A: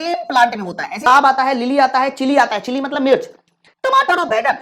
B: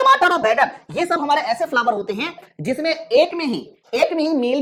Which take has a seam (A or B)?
A